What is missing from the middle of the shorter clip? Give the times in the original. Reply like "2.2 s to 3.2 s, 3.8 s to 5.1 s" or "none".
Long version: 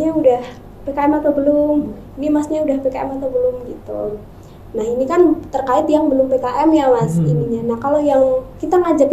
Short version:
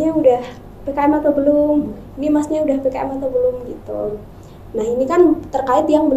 none